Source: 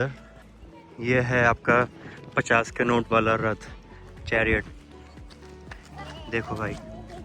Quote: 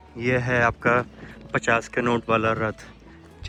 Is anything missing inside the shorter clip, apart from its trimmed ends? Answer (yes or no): no